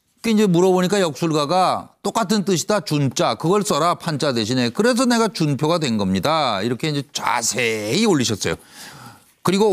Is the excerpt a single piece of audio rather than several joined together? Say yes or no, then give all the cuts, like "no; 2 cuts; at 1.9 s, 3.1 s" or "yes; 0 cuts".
yes; 0 cuts